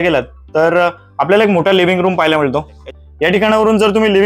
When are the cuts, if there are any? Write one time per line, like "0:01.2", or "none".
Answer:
0:02.9